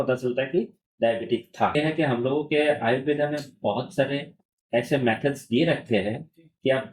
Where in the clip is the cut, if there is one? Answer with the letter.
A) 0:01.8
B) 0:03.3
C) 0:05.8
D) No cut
A